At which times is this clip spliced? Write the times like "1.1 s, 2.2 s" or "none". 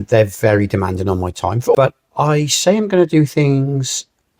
1.7 s